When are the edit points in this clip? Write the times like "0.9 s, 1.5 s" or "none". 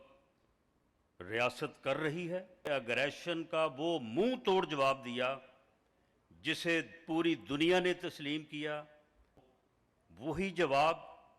2.7 s, 9.5 s